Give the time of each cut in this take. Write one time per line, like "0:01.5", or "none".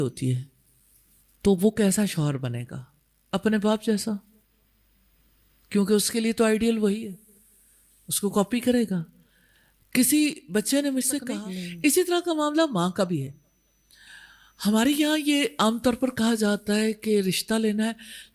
0:11.3